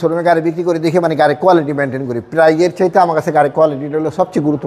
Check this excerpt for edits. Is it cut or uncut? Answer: uncut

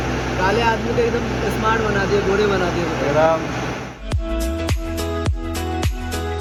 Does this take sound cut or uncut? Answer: uncut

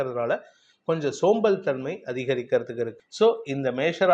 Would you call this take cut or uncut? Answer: cut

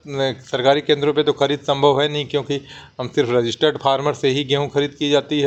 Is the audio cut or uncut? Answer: uncut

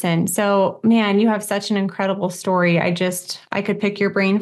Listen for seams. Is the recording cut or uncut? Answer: uncut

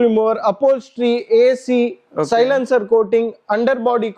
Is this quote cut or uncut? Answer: uncut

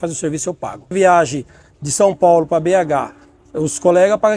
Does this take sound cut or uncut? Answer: cut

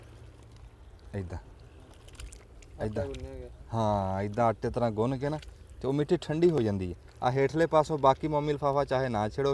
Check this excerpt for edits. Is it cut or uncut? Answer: uncut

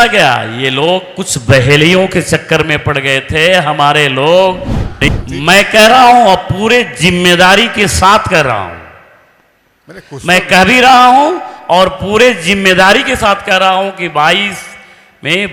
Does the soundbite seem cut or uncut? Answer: cut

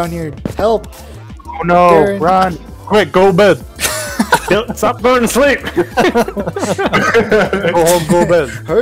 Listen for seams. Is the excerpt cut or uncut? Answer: uncut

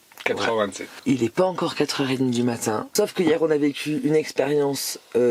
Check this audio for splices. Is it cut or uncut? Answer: cut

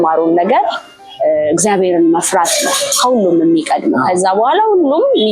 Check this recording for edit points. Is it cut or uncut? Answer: uncut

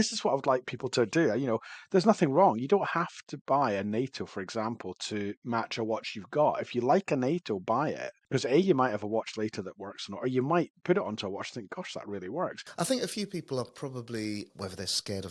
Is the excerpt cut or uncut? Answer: cut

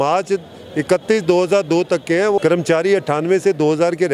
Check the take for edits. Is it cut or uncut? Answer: cut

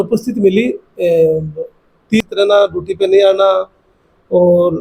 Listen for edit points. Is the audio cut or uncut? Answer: cut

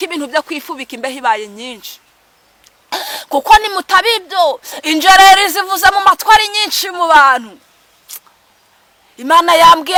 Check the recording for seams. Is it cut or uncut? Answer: uncut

